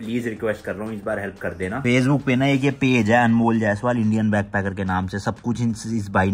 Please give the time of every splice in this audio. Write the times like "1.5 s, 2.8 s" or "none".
none